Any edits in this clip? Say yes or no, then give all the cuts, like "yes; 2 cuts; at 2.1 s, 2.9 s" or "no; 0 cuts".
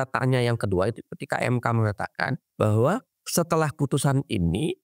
yes; 2 cuts; at 2.4 s, 3.2 s